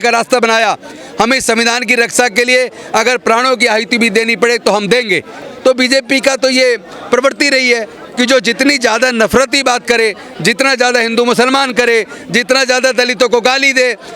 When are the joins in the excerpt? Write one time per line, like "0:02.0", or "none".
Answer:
0:05.4